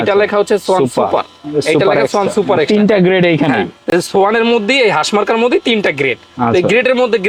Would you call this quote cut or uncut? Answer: uncut